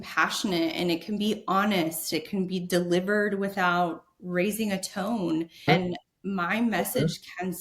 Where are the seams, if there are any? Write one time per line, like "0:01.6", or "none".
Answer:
0:02.1
0:05.7